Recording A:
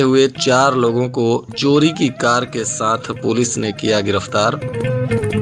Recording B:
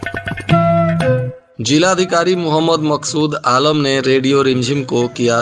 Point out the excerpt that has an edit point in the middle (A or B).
B